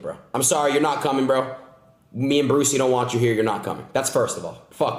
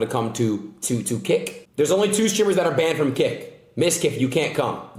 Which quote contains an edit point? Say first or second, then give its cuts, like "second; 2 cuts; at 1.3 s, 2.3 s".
second; 1 cut; at 1.6 s